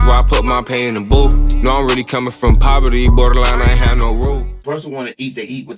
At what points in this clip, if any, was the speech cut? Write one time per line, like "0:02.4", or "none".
0:04.6